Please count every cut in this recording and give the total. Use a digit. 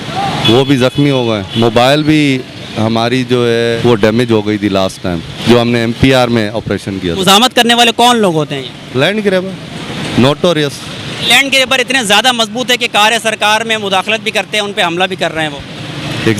5